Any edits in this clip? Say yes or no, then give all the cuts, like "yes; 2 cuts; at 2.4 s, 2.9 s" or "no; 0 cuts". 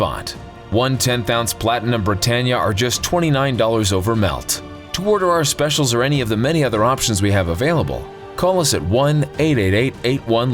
no; 0 cuts